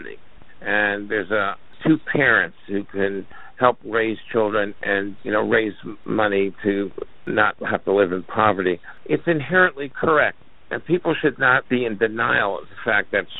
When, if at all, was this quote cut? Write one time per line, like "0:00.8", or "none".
0:01.7
0:05.2
0:06.0
0:07.3
0:08.9
0:11.6